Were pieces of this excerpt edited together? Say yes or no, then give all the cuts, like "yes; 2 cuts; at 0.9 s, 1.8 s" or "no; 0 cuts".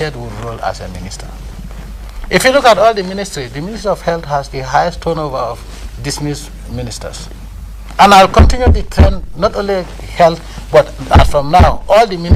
no; 0 cuts